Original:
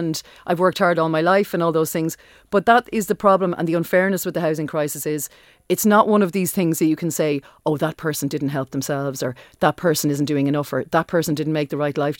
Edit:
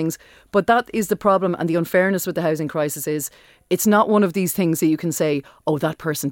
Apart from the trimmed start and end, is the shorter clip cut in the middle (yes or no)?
no